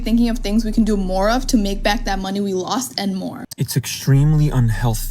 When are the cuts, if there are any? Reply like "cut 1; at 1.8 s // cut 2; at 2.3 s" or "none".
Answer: cut 1; at 3.4 s